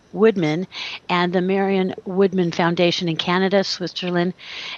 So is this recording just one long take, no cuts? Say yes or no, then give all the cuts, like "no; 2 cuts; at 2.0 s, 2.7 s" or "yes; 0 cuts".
yes; 0 cuts